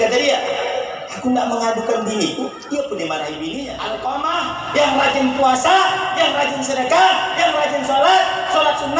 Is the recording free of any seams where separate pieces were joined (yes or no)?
no